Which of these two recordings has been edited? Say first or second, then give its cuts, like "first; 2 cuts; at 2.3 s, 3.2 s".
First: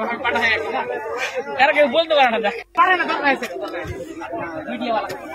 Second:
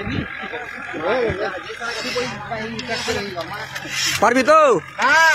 second; 1 cut; at 1.3 s